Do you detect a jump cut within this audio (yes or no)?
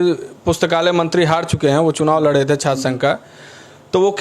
no